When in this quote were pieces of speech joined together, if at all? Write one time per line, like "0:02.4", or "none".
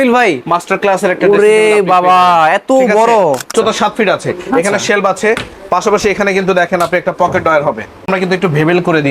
0:03.5
0:08.1